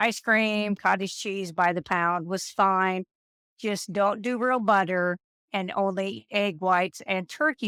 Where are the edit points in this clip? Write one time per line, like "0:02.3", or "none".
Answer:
none